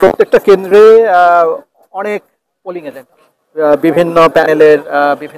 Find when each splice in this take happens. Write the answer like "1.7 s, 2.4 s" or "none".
none

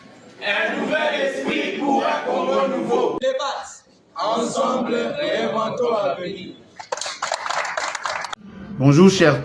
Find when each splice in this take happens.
8.3 s

